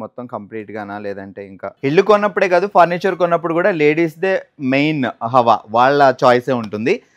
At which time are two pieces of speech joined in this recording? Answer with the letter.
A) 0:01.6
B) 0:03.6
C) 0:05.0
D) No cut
A